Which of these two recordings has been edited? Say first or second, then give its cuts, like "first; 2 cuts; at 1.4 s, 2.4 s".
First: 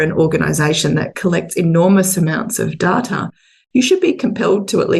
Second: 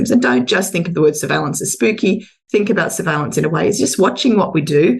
first; 1 cut; at 3.5 s